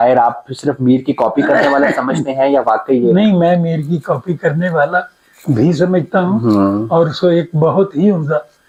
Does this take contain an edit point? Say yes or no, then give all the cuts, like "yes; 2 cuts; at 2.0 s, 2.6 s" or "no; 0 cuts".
no; 0 cuts